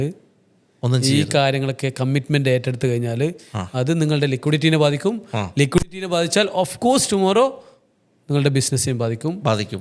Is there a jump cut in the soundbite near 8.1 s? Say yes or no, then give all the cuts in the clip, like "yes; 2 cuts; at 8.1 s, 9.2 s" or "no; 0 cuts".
no; 0 cuts